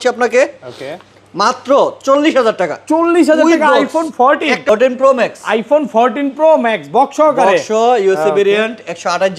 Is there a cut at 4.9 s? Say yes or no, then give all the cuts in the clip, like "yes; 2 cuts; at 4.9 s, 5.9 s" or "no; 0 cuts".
yes; 1 cut; at 4.9 s